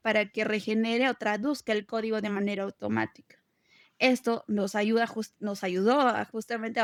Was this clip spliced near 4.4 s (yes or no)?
no